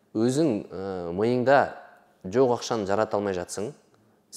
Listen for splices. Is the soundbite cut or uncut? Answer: uncut